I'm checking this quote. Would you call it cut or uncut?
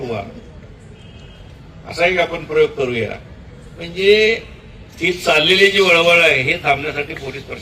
uncut